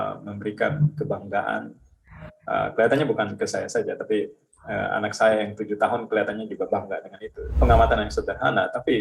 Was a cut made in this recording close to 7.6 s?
yes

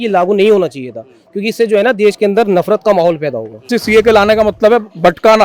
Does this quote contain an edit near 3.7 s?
yes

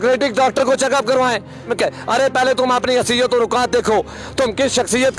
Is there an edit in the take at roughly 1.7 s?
yes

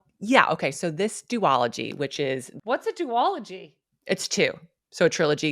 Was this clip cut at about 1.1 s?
no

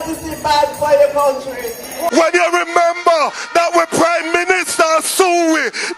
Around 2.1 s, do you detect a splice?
yes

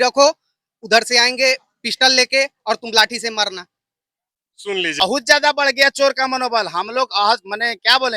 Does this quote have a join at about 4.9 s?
yes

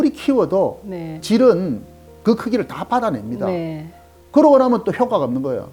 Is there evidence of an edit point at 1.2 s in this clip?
yes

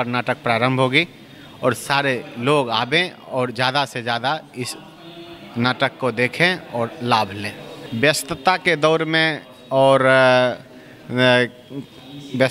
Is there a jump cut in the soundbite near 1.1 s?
no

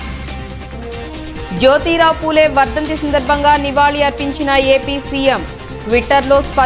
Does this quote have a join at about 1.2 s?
yes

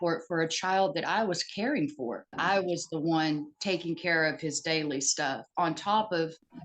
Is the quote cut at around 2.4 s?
yes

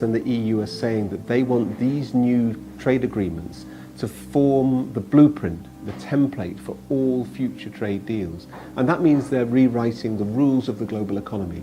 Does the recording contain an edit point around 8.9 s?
yes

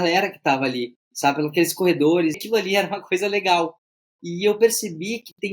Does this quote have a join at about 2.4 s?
yes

